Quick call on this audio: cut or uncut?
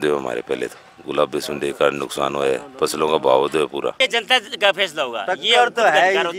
cut